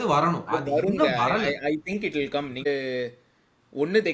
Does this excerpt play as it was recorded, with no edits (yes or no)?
no